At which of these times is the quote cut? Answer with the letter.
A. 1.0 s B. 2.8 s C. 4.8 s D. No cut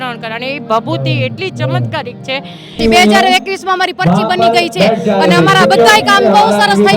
B